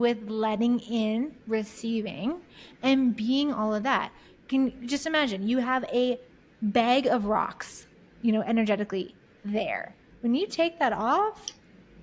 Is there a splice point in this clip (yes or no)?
no